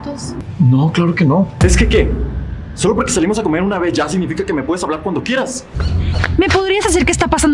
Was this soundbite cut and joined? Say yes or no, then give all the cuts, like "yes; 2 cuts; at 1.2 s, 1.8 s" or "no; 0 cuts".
yes; 2 cuts; at 1.6 s, 5.8 s